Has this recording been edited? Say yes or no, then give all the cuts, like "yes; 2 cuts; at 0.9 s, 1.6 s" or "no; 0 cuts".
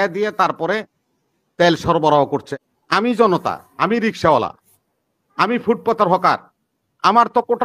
yes; 1 cut; at 2.6 s